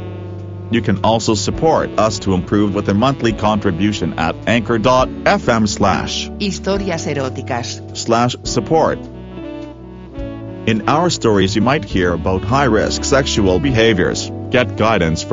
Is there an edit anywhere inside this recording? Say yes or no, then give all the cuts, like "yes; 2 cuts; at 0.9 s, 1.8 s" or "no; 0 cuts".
yes; 2 cuts; at 9.0 s, 10.6 s